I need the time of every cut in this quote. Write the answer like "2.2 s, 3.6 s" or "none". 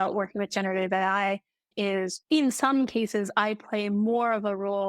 1.7 s